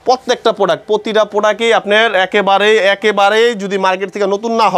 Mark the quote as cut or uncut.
uncut